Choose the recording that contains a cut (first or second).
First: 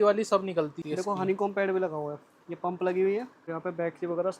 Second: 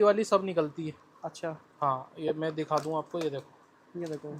first